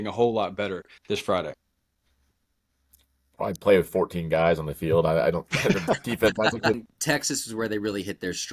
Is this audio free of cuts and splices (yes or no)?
no